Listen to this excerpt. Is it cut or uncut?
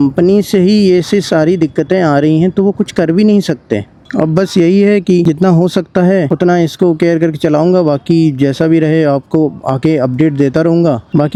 uncut